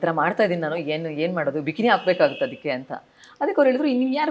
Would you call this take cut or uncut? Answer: uncut